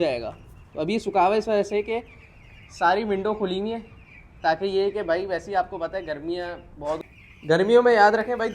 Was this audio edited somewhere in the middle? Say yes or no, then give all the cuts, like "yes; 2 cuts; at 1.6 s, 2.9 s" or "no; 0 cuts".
yes; 1 cut; at 7.0 s